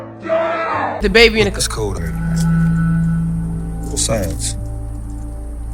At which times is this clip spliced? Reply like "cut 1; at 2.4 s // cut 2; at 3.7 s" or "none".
cut 1; at 1.0 s